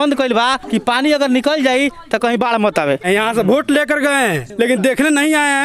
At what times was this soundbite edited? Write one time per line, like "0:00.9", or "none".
0:03.0